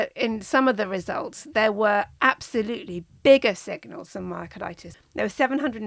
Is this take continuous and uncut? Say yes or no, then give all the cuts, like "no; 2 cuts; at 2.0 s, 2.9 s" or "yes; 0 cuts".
no; 1 cut; at 4.9 s